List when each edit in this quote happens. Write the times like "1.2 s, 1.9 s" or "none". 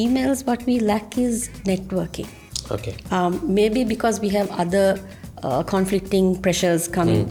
none